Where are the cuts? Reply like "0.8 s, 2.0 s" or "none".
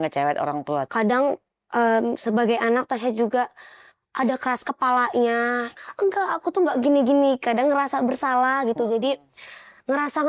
0.9 s, 5.7 s